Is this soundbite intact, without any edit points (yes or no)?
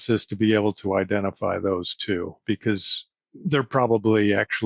yes